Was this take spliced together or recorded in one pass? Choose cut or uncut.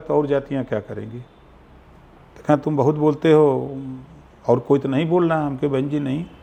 uncut